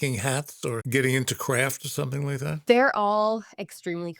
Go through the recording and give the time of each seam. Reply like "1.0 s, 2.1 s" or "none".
0.8 s, 2.6 s